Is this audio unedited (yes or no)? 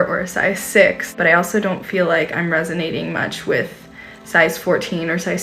no